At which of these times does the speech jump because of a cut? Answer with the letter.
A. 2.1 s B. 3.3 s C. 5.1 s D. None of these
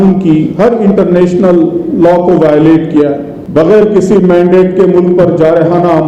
B